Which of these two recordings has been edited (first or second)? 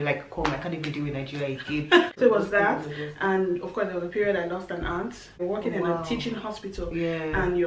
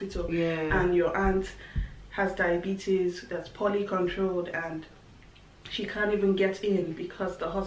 first